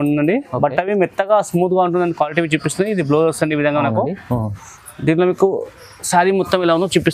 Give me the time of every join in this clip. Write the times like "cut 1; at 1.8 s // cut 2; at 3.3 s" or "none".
none